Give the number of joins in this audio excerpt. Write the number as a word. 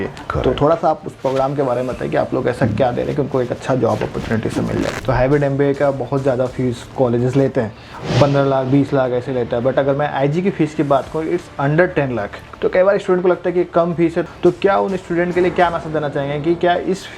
three